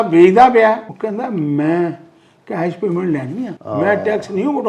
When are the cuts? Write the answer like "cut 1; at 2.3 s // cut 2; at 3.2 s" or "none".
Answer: cut 1; at 0.9 s // cut 2; at 3.6 s